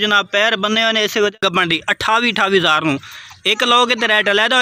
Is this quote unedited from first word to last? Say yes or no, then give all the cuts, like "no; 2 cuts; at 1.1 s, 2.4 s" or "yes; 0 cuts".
no; 1 cut; at 1.3 s